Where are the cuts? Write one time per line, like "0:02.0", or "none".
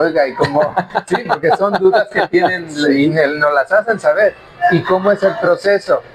none